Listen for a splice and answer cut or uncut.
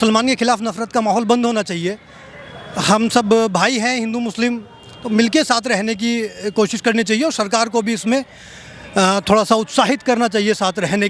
uncut